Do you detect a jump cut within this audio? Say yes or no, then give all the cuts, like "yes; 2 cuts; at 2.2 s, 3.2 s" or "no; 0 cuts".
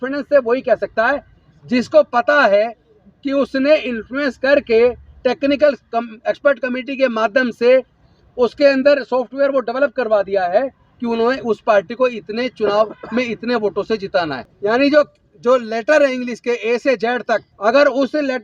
yes; 2 cuts; at 14.4 s, 17.5 s